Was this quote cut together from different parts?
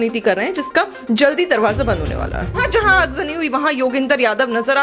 yes; 1 cut; at 2.6 s

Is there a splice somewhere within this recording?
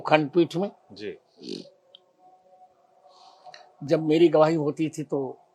no; 0 cuts

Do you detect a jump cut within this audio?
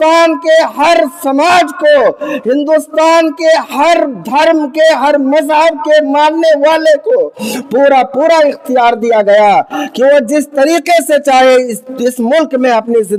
no; 0 cuts

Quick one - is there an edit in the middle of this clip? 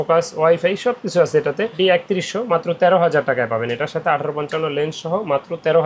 yes; 1 cut; at 1.7 s

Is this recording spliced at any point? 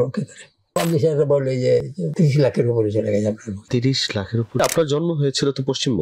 yes; 4 cuts; at 0.8 s, 2.0 s, 3.5 s, 4.6 s

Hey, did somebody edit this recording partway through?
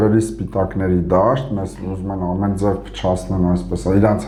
no; 0 cuts

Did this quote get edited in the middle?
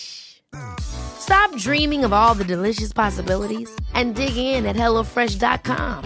no; 0 cuts

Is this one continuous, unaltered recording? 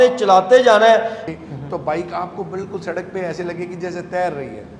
no; 1 cut; at 1.2 s

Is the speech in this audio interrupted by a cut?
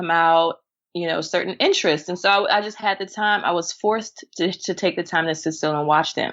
no; 0 cuts

